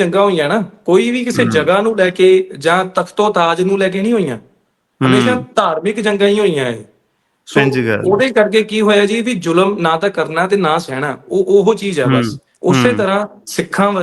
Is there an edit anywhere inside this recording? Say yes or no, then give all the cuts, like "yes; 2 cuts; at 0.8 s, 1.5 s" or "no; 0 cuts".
yes; 1 cut; at 12.4 s